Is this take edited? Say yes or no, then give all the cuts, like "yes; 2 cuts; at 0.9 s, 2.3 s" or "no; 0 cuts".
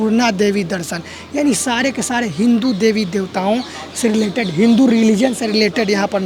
no; 0 cuts